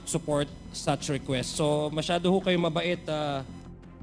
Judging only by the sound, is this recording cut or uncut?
uncut